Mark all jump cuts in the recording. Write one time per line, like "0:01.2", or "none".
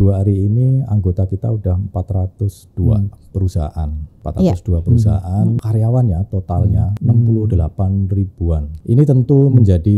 0:04.2
0:05.6
0:06.9
0:08.7